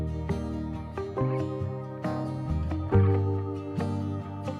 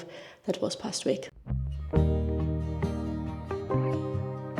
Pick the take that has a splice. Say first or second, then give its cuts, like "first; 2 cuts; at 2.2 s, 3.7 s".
second; 1 cut; at 1.3 s